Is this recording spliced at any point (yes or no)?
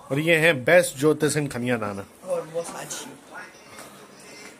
no